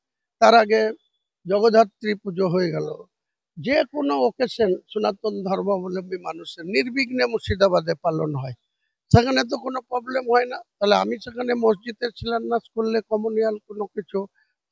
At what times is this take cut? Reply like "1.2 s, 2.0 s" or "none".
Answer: none